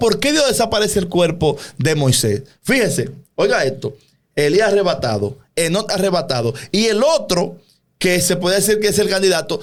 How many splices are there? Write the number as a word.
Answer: zero